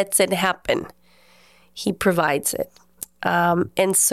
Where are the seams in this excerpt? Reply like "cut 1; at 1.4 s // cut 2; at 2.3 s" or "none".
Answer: none